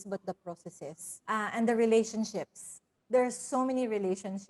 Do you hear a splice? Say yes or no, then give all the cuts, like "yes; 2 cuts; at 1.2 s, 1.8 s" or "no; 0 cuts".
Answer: yes; 1 cut; at 1.1 s